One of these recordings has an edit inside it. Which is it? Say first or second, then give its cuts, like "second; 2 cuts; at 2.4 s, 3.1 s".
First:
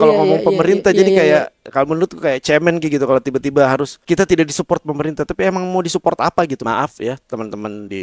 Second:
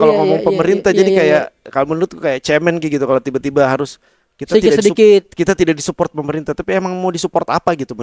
first; 2 cuts; at 4.0 s, 6.6 s